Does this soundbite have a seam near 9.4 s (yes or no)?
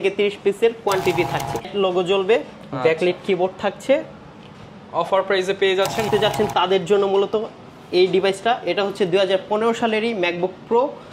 no